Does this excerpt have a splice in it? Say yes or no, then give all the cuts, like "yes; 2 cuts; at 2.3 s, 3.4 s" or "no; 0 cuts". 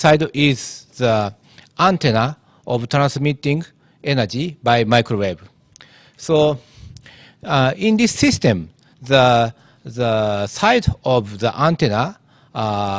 yes; 1 cut; at 11.3 s